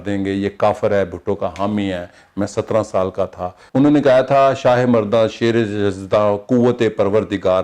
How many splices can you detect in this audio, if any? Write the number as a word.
one